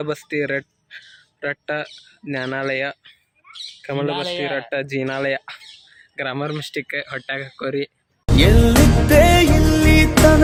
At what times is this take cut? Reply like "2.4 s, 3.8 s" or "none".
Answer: none